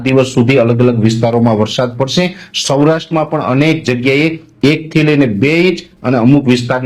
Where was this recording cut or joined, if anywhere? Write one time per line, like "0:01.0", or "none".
none